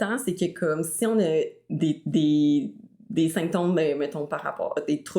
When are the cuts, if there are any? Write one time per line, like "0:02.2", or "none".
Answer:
none